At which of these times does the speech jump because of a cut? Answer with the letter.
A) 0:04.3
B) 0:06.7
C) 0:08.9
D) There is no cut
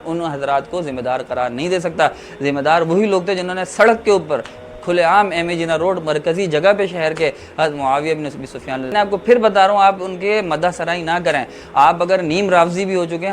C